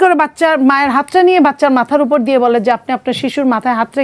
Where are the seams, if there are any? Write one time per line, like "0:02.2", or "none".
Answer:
none